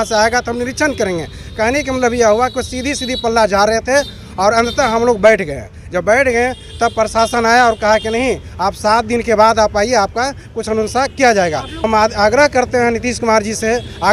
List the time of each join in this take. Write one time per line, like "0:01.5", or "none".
0:11.7